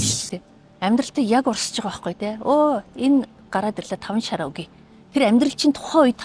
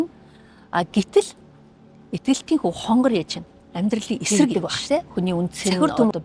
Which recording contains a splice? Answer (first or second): second